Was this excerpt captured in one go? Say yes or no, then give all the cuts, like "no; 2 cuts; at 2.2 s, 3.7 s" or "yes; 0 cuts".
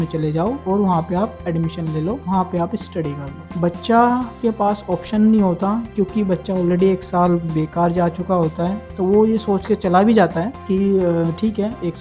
yes; 0 cuts